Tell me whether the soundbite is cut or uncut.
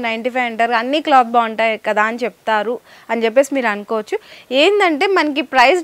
uncut